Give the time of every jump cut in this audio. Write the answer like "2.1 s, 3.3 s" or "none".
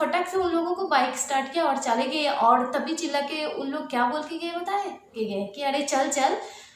5.1 s